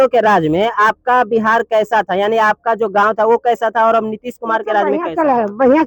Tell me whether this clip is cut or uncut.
uncut